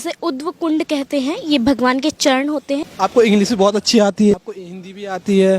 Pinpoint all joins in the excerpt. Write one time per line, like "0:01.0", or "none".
0:02.9
0:04.3